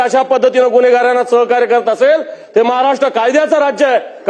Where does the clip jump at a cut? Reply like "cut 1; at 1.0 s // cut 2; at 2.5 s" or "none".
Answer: none